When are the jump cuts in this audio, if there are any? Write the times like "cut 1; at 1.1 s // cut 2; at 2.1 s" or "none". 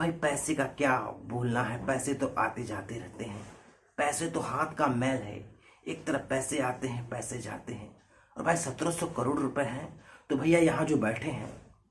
cut 1; at 3.5 s